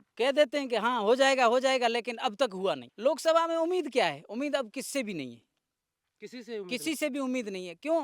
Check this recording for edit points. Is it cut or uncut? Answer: cut